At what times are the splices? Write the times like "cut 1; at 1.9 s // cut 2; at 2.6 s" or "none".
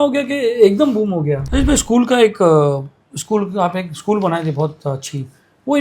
cut 1; at 1.4 s